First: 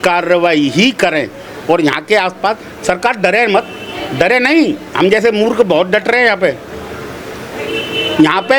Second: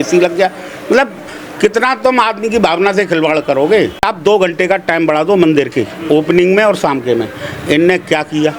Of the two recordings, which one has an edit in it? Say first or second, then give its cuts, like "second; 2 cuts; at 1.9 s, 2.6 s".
second; 1 cut; at 4.0 s